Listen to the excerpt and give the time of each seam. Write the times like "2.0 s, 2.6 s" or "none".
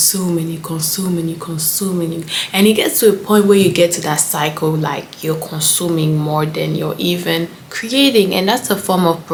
none